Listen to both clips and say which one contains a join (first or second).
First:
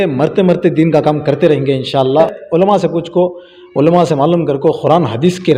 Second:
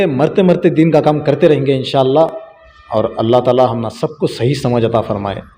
first